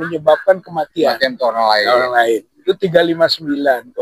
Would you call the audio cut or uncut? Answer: uncut